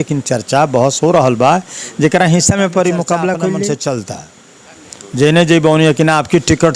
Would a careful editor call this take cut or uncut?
cut